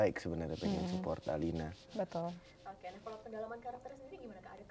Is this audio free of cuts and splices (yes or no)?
yes